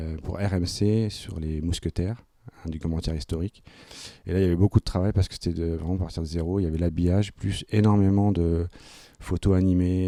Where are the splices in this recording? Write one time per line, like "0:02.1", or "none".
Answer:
none